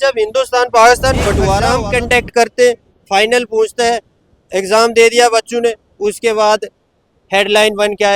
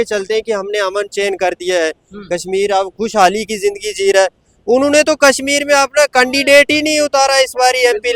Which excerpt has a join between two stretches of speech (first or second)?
first